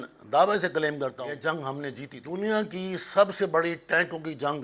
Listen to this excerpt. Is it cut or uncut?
cut